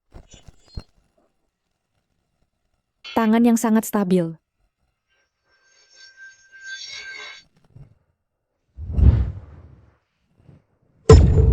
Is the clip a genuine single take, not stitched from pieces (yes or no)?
no